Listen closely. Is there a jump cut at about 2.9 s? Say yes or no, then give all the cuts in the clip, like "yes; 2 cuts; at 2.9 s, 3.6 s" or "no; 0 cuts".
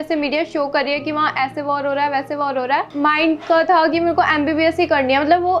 yes; 1 cut; at 2.9 s